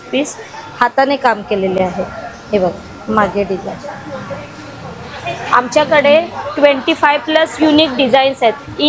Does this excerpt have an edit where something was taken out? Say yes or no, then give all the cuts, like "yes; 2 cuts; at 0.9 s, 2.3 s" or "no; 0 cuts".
no; 0 cuts